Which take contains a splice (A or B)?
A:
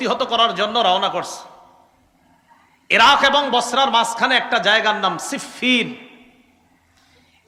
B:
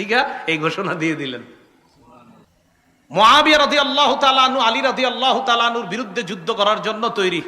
B